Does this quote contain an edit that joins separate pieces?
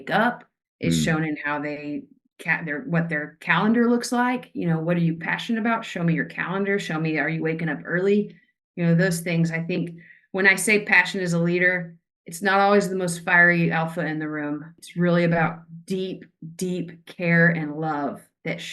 yes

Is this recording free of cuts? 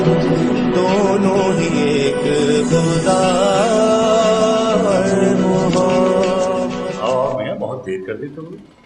no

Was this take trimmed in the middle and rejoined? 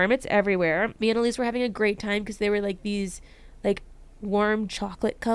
yes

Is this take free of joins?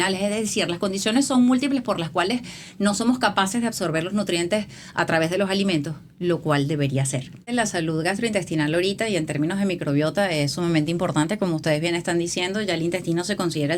no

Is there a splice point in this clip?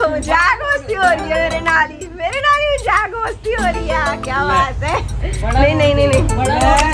no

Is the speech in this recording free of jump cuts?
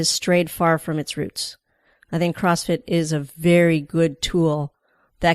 yes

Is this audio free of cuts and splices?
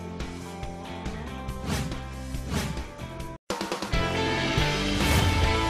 no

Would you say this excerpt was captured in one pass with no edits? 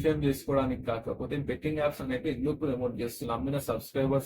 no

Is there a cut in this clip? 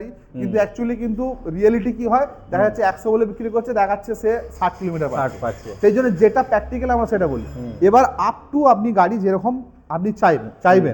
no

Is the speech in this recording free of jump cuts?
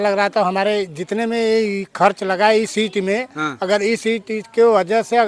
yes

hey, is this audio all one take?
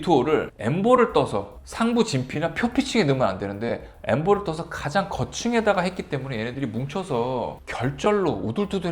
no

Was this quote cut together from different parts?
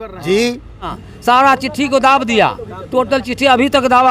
yes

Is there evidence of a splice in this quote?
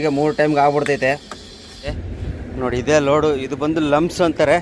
yes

